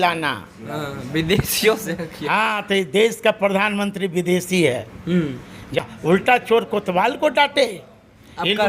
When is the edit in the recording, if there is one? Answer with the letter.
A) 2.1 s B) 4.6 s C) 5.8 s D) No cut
C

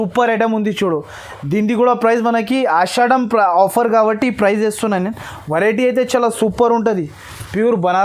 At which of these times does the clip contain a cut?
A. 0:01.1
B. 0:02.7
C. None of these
C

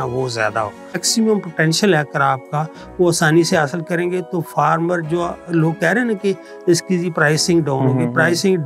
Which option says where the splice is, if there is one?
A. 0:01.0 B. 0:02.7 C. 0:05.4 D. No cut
A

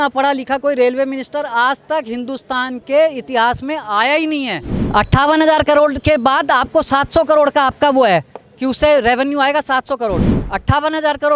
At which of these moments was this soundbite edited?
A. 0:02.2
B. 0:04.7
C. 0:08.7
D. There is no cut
B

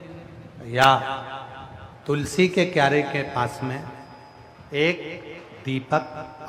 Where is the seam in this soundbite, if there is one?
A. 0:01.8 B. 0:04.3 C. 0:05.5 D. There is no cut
D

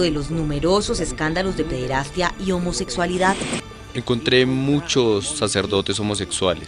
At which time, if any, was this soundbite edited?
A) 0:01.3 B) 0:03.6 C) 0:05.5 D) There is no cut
B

